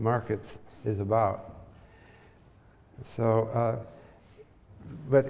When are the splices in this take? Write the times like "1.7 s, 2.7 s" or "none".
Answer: none